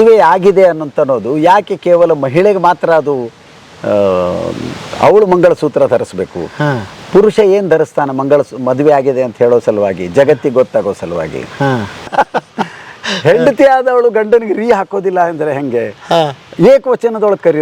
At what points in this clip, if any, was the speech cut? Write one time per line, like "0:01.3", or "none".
0:12.1